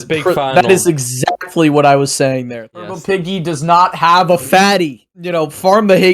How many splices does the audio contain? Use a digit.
2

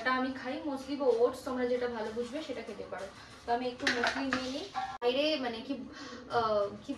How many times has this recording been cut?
1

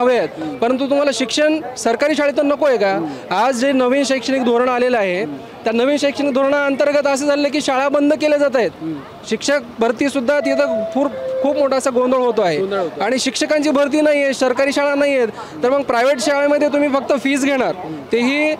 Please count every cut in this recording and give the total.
0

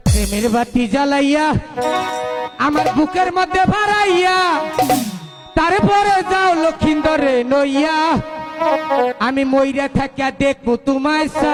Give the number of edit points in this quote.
0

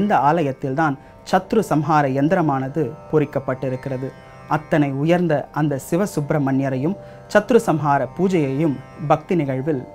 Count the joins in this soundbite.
1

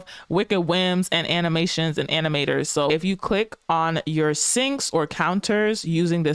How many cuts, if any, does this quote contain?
1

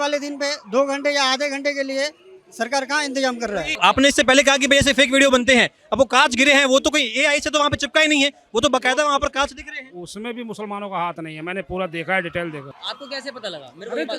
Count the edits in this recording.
2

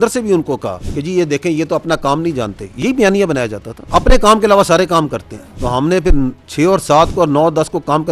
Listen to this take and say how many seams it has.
0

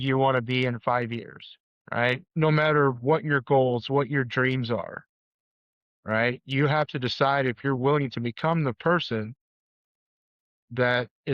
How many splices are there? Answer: 1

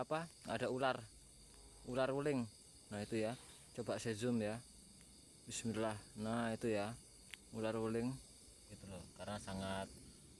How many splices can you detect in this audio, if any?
1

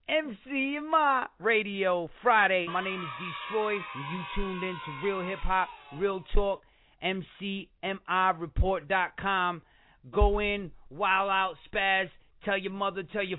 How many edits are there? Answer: 1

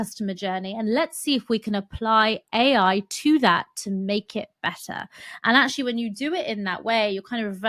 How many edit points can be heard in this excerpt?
0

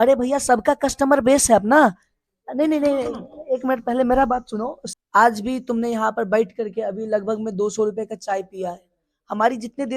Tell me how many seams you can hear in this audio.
1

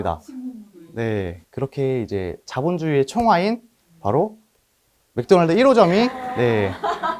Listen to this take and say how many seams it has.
1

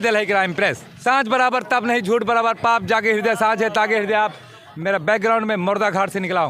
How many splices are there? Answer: 2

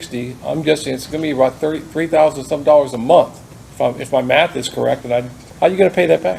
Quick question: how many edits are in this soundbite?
1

